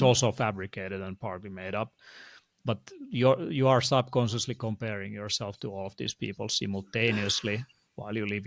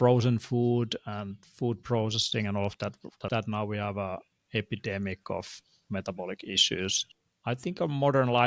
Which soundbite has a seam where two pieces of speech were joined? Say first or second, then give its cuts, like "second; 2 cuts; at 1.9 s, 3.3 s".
second; 2 cuts; at 3.3 s, 7.0 s